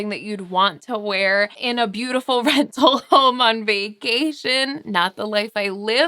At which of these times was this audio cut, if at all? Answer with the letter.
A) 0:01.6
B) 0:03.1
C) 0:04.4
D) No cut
A